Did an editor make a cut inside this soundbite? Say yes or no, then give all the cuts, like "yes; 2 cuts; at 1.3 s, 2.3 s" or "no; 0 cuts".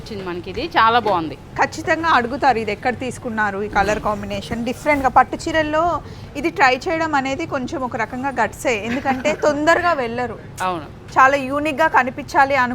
no; 0 cuts